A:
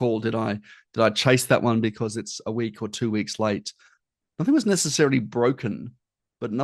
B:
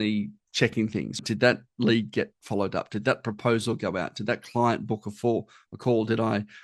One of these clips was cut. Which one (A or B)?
B